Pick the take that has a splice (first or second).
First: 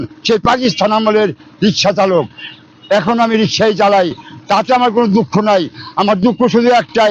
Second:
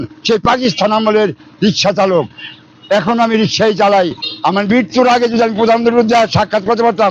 second